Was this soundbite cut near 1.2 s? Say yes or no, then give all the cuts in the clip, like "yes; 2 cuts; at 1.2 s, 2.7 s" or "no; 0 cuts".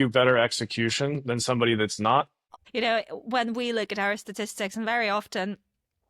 no; 1 cut; at 2.5 s